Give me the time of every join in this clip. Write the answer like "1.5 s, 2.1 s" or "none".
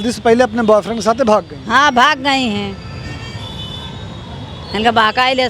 none